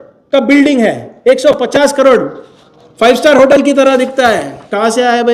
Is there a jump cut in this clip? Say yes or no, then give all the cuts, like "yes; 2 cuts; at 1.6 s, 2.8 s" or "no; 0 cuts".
no; 0 cuts